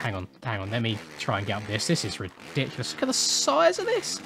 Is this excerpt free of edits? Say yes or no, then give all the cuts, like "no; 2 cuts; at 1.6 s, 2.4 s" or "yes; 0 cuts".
yes; 0 cuts